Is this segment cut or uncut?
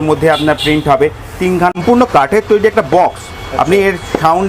cut